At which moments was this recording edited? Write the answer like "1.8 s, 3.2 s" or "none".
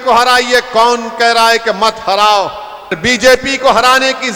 3.0 s